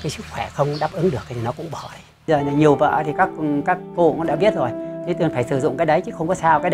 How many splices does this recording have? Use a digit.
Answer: 1